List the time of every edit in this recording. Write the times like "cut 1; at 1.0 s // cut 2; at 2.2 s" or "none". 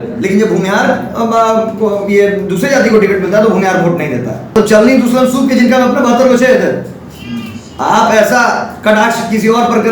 cut 1; at 4.6 s